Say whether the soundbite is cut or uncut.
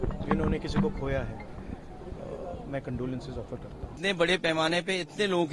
cut